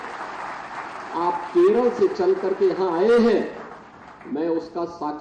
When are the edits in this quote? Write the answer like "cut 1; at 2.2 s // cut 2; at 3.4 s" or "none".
none